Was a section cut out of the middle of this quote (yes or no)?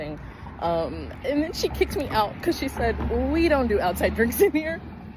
no